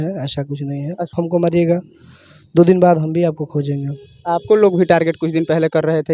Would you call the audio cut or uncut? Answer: cut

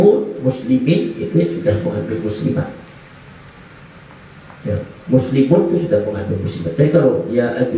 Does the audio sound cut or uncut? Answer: uncut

